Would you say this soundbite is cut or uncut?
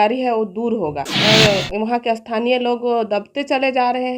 cut